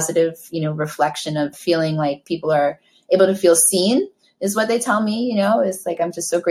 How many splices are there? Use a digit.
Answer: 1